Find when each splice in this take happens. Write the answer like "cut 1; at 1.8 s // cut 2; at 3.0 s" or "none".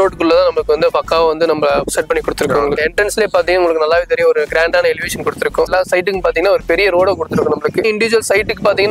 cut 1; at 2.8 s // cut 2; at 5.7 s // cut 3; at 7.8 s